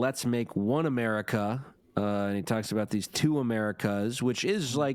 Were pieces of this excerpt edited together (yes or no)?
no